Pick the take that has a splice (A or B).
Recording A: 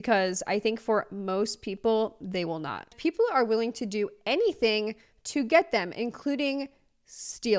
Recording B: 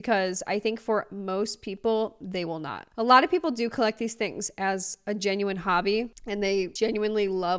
A